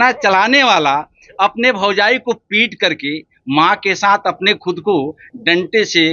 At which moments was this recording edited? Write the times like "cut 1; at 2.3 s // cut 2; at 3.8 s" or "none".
none